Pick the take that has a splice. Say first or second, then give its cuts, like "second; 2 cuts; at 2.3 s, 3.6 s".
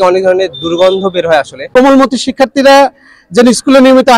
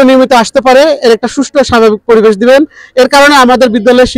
first; 1 cut; at 1.7 s